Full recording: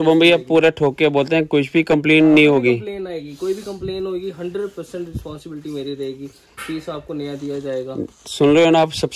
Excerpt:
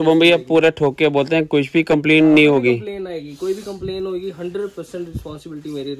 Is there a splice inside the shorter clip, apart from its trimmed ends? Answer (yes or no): no